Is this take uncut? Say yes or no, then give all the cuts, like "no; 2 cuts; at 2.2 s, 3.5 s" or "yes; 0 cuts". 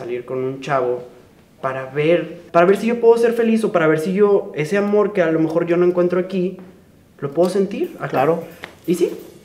no; 1 cut; at 2.4 s